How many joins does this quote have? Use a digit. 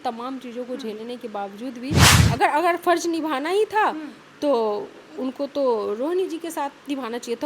1